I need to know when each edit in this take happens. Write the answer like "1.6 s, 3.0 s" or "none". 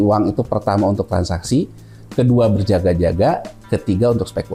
none